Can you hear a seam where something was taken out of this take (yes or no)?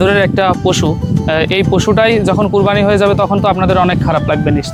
no